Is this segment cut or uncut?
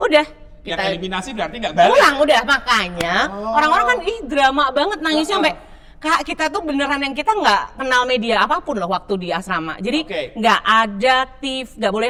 uncut